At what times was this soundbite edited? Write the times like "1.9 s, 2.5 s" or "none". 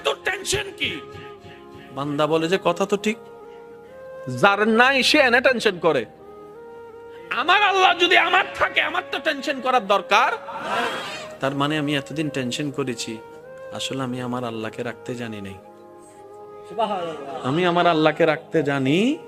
6.1 s, 7.4 s